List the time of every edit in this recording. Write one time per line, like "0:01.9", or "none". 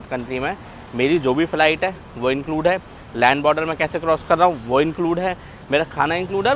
none